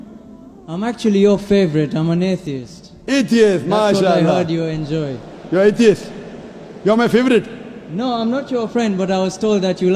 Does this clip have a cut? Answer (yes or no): no